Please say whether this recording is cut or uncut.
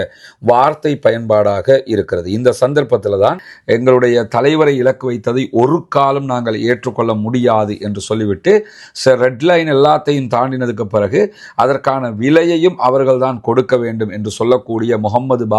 cut